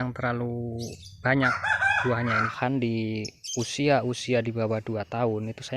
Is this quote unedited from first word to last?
no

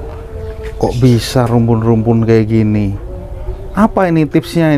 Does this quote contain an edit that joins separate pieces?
no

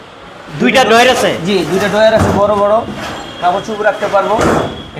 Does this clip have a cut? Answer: no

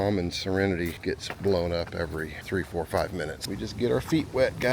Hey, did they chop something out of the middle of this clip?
yes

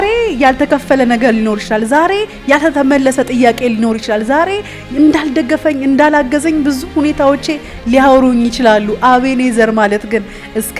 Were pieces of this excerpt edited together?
no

